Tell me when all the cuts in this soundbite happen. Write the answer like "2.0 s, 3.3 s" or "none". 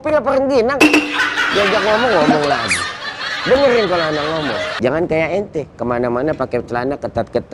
4.7 s